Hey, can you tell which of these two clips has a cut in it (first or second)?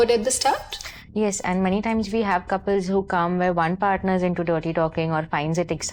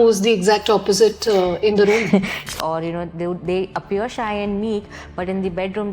second